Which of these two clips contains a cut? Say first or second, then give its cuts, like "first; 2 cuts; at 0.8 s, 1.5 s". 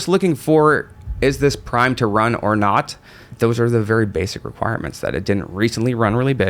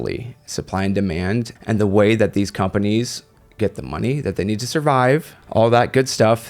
second; 2 cuts; at 1.6 s, 5.4 s